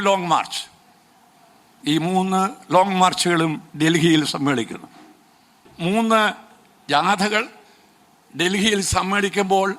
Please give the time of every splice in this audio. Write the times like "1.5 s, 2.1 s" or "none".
5.7 s

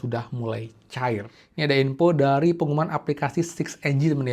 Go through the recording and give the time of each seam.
1.4 s

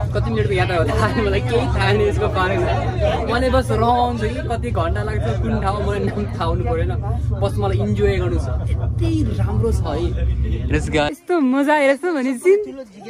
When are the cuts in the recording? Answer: 11.1 s

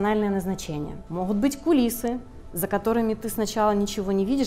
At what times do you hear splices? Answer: 1.0 s

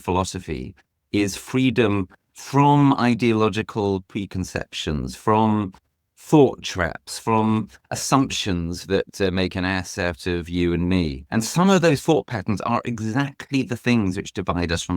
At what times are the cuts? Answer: 11.2 s

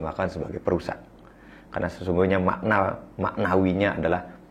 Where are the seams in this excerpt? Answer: none

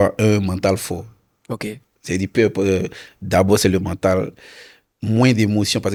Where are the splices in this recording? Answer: none

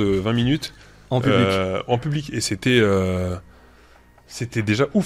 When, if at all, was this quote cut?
none

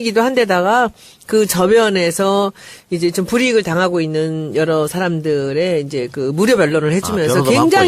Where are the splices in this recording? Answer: 6.4 s

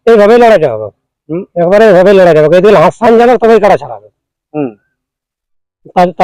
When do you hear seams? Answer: none

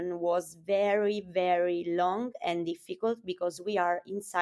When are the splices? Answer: none

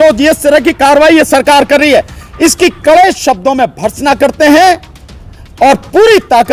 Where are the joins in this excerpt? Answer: none

